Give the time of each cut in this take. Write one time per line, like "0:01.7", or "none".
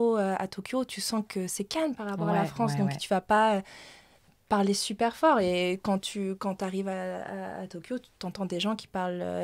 none